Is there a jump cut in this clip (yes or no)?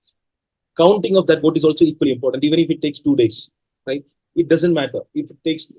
no